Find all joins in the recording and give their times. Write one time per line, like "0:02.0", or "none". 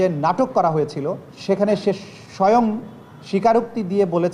0:01.3

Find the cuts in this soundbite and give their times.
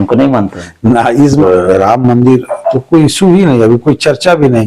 0:01.4

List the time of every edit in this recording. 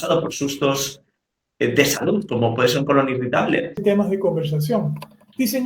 0:03.8

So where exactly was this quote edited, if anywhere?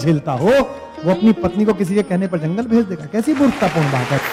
none

